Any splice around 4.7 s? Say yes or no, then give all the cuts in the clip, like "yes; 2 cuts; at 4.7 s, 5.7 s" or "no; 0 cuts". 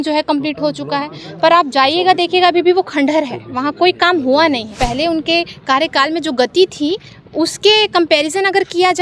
yes; 1 cut; at 4.7 s